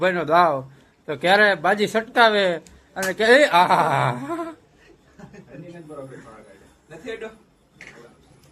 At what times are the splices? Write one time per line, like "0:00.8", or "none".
none